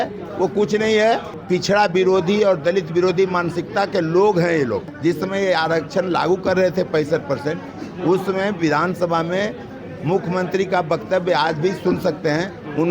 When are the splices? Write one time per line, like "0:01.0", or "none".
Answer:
0:01.3
0:04.9